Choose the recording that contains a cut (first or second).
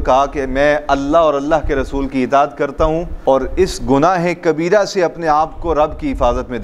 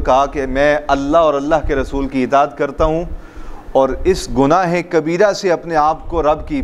first